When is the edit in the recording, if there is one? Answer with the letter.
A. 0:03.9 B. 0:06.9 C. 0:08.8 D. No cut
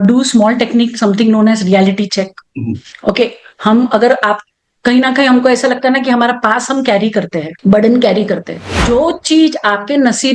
C